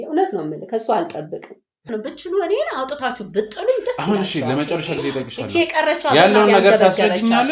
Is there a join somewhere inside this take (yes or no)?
yes